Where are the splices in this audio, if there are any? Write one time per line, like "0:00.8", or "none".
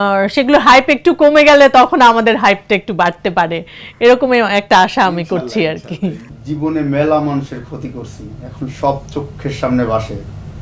0:06.3